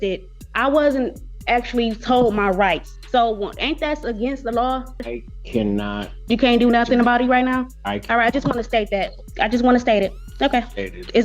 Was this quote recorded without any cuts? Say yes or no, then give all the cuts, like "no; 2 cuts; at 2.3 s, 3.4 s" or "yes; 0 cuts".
no; 4 cuts; at 2.9 s, 5.0 s, 9.2 s, 10.2 s